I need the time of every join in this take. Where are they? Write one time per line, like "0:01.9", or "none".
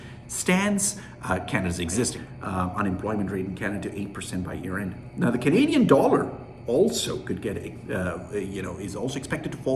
0:02.2